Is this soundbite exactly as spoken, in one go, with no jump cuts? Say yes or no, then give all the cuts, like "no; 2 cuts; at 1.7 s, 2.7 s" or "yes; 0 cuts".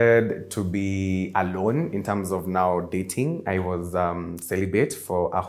yes; 0 cuts